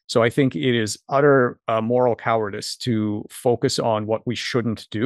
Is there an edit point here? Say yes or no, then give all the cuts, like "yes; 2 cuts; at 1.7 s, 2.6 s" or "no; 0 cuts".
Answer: no; 0 cuts